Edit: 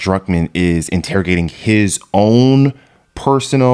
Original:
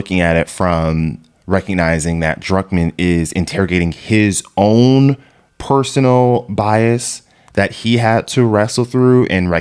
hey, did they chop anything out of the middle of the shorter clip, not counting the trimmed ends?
no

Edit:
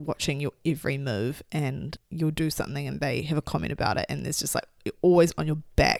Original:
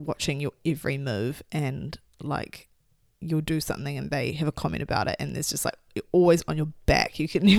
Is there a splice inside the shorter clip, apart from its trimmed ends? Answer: yes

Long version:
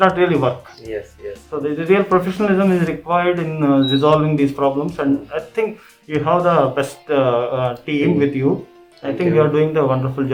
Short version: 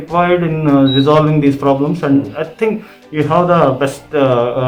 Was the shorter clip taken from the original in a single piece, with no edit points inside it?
yes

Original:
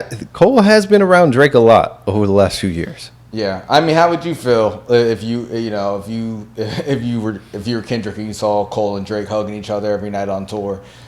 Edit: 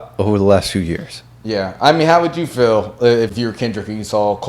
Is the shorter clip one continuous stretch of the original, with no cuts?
no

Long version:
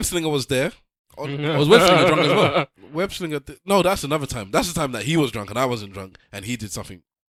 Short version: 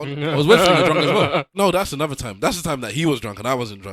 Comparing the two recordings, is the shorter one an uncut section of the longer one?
no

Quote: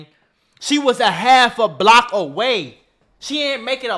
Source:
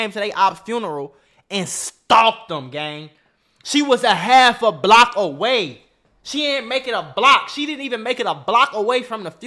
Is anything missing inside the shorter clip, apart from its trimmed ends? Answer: no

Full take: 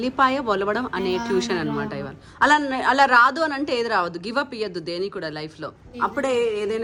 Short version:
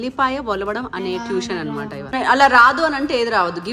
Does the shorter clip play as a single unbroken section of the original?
no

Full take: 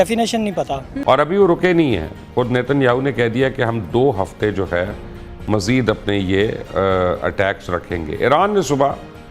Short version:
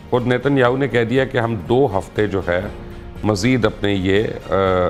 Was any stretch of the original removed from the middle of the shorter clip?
no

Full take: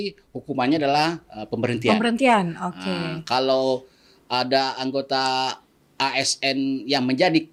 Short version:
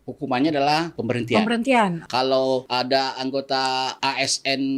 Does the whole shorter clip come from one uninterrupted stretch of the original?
no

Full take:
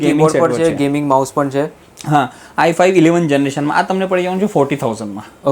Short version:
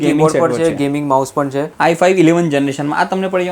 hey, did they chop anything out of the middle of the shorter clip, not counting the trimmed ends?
yes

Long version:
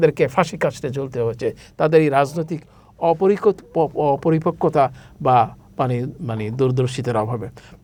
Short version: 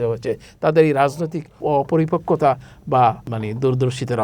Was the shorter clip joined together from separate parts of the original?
yes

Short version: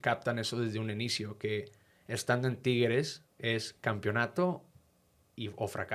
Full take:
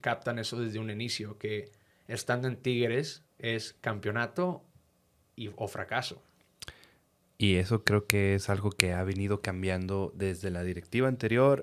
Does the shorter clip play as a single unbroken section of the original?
yes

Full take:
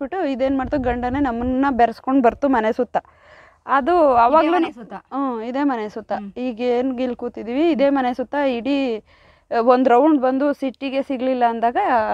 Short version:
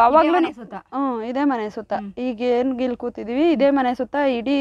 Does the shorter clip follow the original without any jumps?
yes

